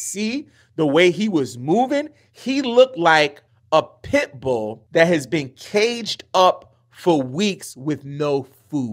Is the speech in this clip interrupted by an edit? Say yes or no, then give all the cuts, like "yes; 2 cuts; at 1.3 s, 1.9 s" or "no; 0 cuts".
yes; 2 cuts; at 3.5 s, 4.8 s